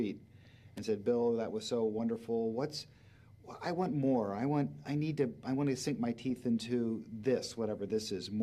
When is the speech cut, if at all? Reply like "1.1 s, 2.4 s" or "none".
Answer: 4.2 s